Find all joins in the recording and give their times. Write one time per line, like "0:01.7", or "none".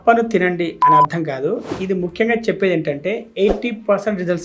0:01.7